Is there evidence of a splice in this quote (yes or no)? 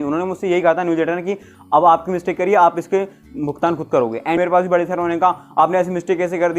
yes